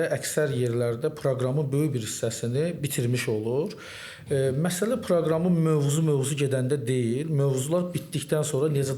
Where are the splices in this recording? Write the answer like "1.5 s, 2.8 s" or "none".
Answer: none